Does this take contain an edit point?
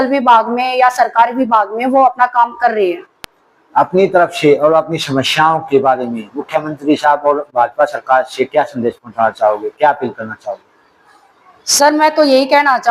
no; 0 cuts

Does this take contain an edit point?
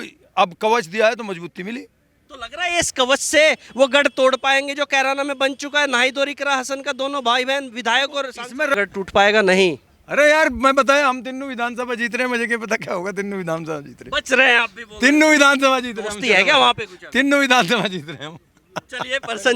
yes; 1 cut; at 8.7 s

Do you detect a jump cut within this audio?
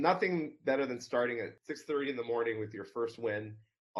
yes; 1 cut; at 1.6 s

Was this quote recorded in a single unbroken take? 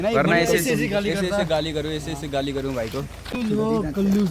no; 1 cut; at 3.3 s

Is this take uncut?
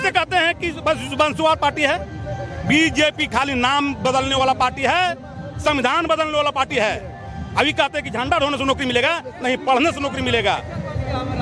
yes; 0 cuts

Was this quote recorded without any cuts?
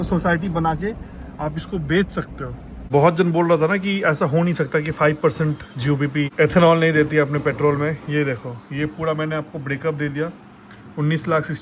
no; 2 cuts; at 2.9 s, 6.3 s

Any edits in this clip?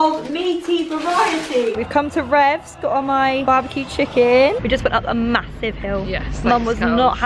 yes; 3 cuts; at 1.7 s, 3.4 s, 4.6 s

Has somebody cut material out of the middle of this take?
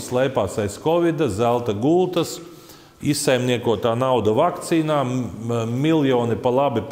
no; 0 cuts

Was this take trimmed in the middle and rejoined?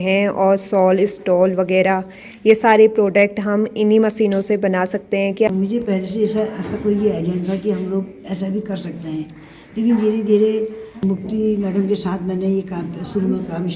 yes; 2 cuts; at 5.5 s, 11.1 s

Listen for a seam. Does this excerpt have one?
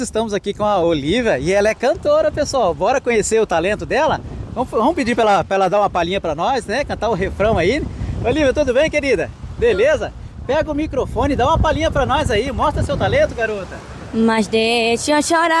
no; 0 cuts

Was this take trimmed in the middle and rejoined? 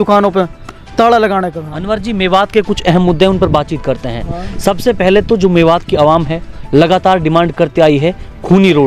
no; 0 cuts

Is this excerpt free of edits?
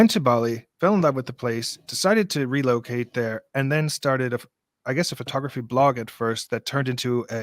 yes; 0 cuts

